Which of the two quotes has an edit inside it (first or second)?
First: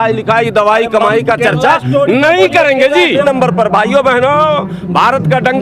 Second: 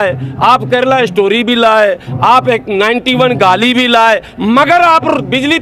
first